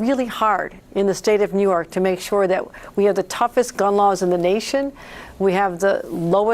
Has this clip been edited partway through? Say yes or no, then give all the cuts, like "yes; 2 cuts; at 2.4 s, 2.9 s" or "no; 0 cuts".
no; 0 cuts